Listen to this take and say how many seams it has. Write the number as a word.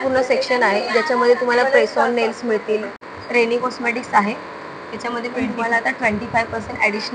one